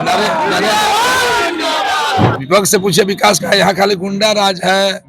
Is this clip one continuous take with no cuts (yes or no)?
no